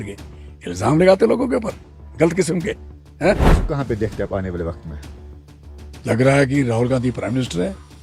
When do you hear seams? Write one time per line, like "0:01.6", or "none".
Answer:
0:03.7